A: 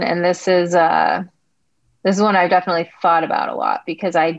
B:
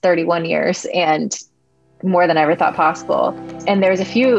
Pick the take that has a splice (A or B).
B